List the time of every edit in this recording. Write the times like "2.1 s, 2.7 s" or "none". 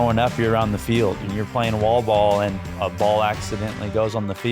1.2 s, 2.7 s

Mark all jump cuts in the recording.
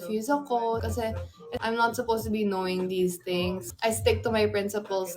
0.9 s, 3.7 s

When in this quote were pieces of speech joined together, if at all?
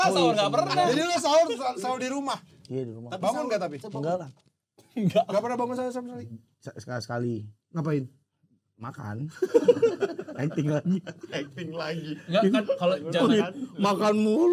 none

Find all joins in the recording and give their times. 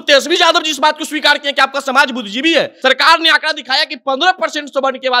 2.7 s

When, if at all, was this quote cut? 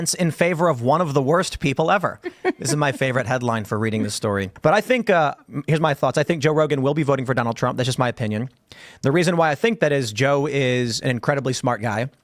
4.5 s

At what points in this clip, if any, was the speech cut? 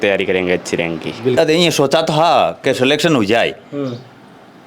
1.4 s

